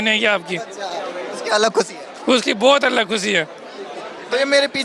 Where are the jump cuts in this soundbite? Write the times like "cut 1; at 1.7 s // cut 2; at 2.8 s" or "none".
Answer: none